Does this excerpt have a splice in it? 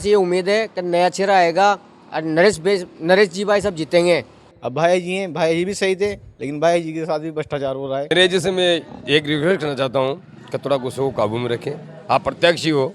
yes; 2 cuts; at 4.4 s, 8.1 s

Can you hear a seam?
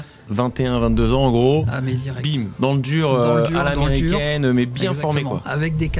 no; 0 cuts

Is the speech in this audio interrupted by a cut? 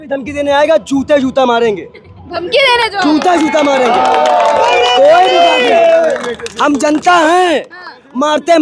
no; 0 cuts

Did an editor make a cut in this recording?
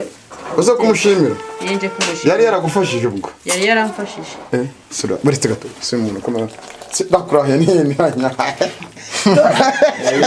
no; 0 cuts

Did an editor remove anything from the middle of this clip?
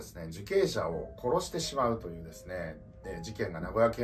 no; 0 cuts

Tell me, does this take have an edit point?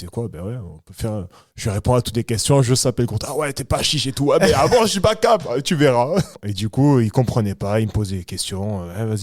yes; 1 cut; at 6.4 s

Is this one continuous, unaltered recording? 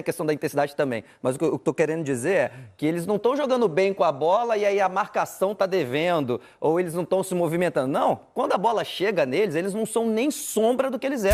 yes; 0 cuts

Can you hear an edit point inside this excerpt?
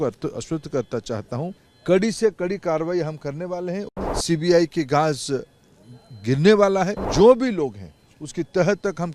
yes; 3 cuts; at 1.7 s, 3.9 s, 7.0 s

